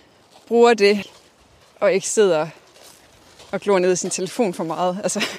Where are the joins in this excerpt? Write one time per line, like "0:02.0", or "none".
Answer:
0:01.2